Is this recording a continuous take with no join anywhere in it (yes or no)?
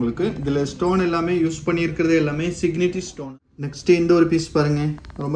no